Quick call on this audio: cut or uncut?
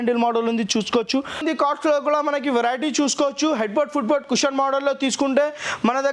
cut